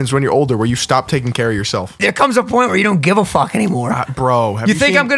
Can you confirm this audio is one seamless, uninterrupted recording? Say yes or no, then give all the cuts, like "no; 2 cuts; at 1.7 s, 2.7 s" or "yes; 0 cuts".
no; 1 cut; at 1.9 s